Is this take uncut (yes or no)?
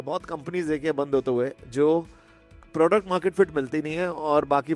yes